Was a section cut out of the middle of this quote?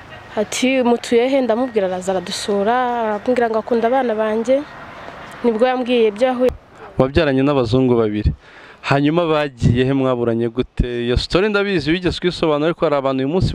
yes; 1 cut; at 6.5 s

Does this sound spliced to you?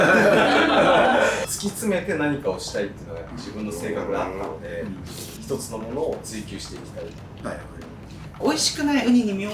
yes; 2 cuts; at 1.5 s, 8.3 s

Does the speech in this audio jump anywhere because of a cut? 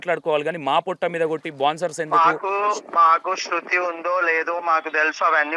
no; 0 cuts

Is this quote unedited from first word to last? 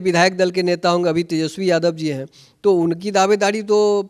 yes; 0 cuts

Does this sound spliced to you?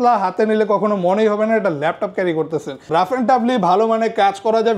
yes; 1 cut; at 2.7 s

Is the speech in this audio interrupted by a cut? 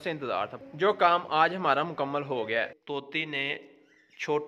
yes; 1 cut; at 2.8 s

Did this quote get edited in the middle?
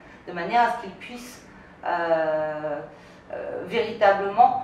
no; 0 cuts

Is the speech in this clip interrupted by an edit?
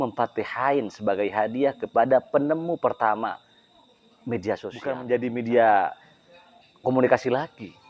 yes; 1 cut; at 5.0 s

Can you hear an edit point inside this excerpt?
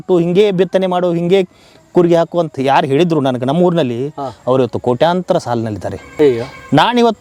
no; 0 cuts

